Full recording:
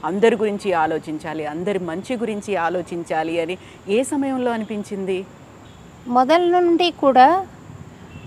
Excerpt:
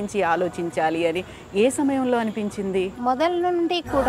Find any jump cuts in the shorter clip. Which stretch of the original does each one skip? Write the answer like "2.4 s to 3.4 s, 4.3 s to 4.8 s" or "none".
5.3 s to 6.0 s